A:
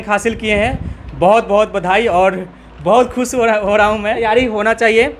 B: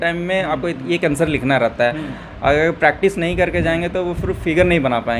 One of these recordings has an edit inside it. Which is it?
A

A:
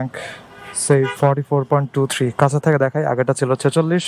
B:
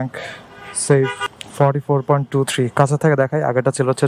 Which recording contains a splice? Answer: A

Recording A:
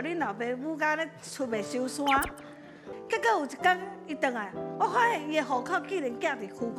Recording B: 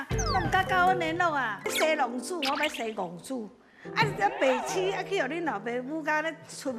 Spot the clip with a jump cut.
B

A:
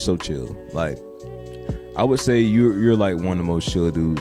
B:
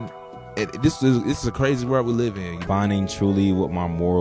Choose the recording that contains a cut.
B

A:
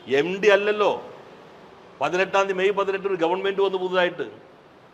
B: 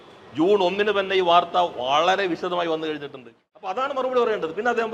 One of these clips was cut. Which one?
B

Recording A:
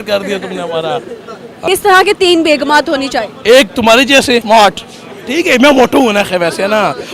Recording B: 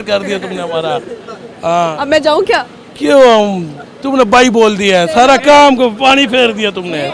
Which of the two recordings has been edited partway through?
A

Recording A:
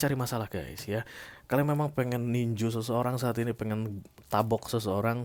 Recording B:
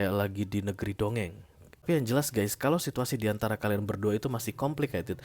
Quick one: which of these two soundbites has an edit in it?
B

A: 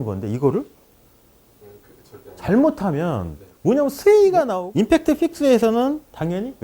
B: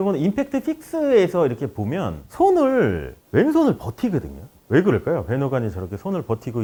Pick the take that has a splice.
A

